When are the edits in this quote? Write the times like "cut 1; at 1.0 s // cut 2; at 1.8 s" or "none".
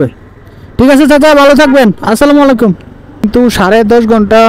cut 1; at 3.2 s